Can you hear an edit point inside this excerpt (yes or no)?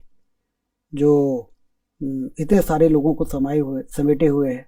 no